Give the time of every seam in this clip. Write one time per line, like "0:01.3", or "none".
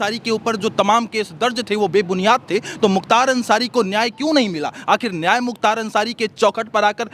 none